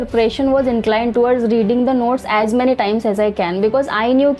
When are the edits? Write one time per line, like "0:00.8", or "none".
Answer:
none